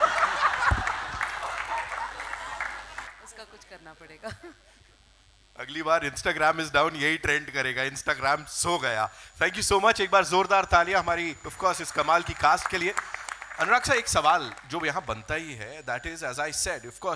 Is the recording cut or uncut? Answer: uncut